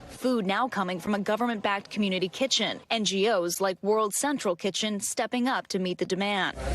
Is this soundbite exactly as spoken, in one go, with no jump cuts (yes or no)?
no